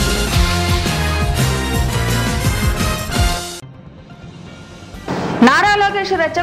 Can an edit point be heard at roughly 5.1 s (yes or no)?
yes